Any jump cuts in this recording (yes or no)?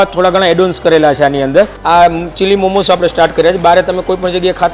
yes